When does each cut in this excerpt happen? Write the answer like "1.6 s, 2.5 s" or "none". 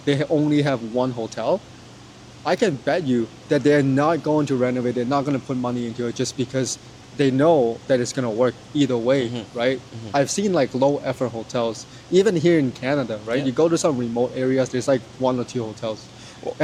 none

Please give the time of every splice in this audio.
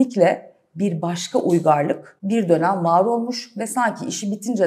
2.1 s

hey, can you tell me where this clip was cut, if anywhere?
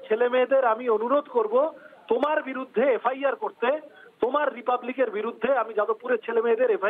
none

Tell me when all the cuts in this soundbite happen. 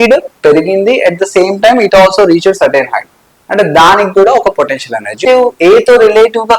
5.2 s

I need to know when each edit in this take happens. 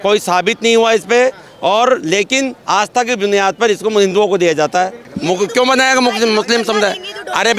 5.1 s

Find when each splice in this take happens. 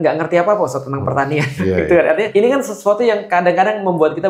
1.5 s, 2.3 s

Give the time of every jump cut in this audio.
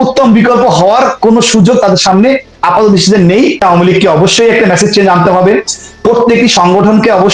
3.6 s

